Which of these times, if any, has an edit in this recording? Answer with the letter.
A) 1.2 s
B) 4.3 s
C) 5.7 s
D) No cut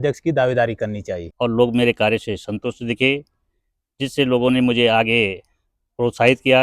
A